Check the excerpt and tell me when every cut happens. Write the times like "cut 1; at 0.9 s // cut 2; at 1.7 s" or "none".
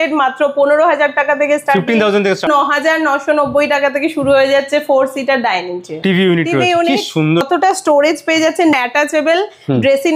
cut 1; at 2.5 s // cut 2; at 6.0 s // cut 3; at 7.4 s // cut 4; at 8.7 s